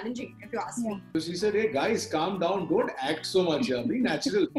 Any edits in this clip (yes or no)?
yes